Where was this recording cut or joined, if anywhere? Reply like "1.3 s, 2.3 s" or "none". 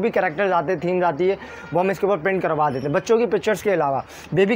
none